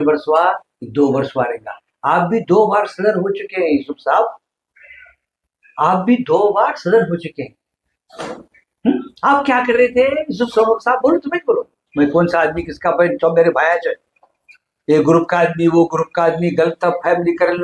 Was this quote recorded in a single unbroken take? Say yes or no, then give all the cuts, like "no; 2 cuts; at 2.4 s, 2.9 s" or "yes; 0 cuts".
yes; 0 cuts